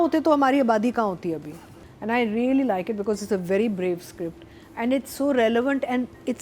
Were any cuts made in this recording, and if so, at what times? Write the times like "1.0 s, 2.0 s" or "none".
1.7 s